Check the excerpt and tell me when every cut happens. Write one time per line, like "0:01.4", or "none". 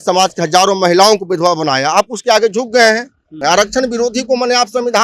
0:03.4